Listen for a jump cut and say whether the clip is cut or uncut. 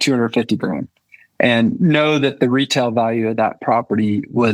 uncut